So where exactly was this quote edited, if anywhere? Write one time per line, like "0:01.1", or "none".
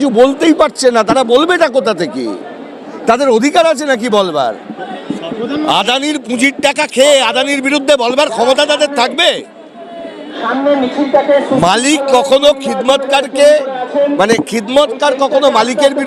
none